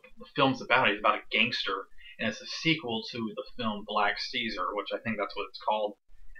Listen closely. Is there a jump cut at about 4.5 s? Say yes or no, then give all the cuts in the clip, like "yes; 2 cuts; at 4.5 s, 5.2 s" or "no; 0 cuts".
yes; 1 cut; at 4.5 s